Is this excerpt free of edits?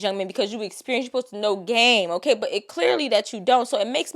yes; 0 cuts

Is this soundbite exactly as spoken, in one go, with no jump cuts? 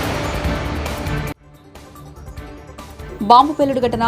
yes; 0 cuts

